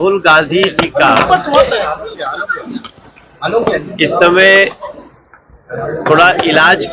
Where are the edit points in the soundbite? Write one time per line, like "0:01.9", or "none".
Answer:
none